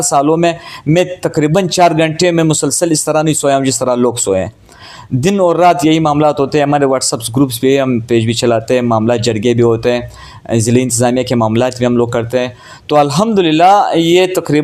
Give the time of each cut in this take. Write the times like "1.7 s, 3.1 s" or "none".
none